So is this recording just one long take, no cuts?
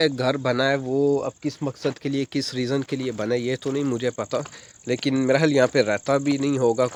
yes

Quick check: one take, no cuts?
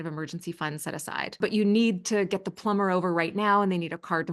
no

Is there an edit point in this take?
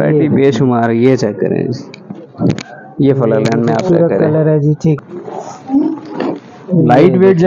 yes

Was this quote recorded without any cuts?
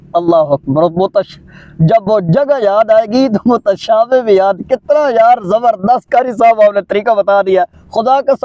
yes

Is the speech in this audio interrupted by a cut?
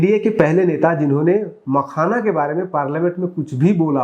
no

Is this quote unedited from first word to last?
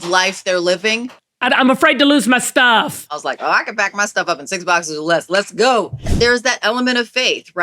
no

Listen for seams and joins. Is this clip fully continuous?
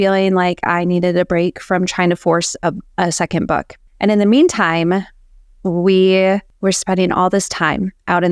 no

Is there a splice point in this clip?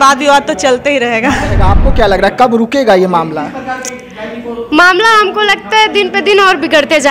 yes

